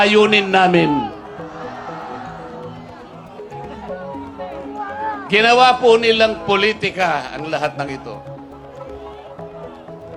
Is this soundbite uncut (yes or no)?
yes